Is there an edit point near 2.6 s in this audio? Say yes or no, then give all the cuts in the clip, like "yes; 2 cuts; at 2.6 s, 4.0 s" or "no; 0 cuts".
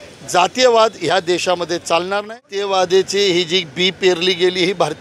yes; 1 cut; at 2.6 s